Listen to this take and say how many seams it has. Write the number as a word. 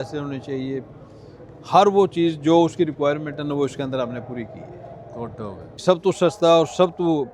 one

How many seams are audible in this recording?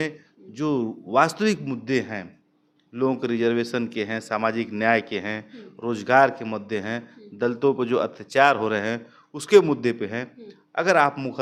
zero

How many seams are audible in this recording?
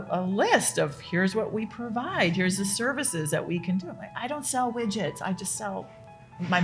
zero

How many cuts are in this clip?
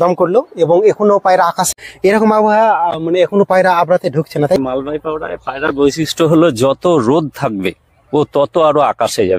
two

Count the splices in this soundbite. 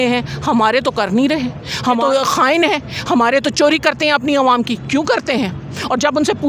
one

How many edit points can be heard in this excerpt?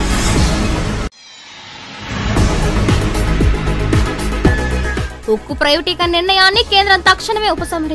zero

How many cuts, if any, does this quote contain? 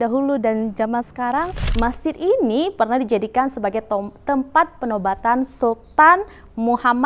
one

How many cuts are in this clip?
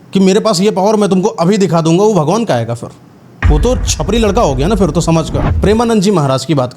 one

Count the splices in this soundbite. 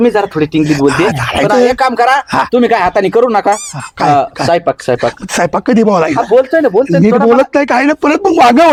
zero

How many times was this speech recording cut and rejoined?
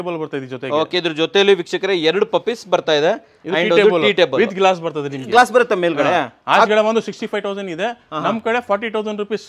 zero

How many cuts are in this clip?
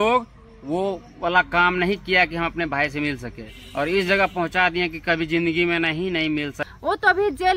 one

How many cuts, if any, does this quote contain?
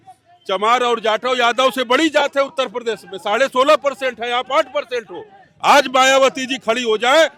zero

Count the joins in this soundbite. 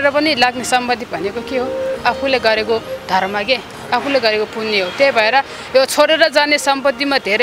zero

